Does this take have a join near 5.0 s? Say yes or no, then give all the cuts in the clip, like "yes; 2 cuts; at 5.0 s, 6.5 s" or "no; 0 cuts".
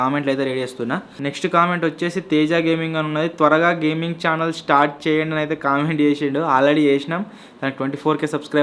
no; 1 cut; at 1.1 s